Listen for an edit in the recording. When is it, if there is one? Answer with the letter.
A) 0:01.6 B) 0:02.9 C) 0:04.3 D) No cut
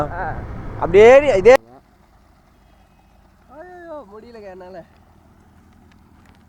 A